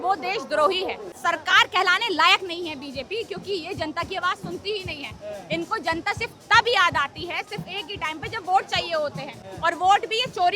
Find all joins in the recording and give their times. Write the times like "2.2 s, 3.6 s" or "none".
1.2 s